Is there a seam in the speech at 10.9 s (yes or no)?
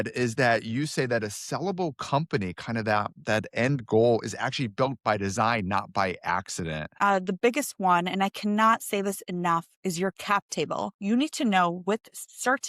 yes